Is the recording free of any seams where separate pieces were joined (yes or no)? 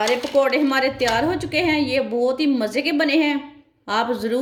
yes